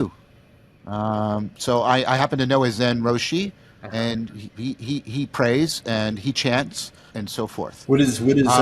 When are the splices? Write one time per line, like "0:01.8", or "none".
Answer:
0:07.2